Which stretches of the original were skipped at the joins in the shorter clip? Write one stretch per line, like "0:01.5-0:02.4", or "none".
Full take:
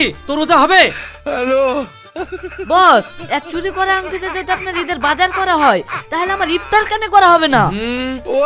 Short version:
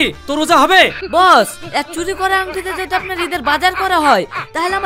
0:01.0-0:02.6